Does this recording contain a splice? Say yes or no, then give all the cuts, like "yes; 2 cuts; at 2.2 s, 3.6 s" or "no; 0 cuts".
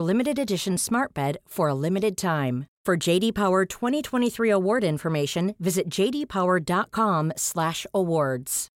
no; 0 cuts